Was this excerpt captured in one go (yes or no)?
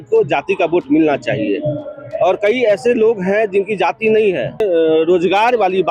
no